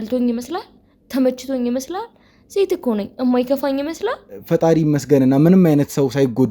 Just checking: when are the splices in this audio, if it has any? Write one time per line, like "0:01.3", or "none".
0:04.3